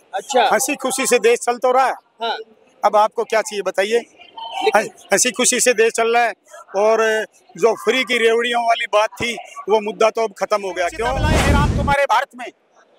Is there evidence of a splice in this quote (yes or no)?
yes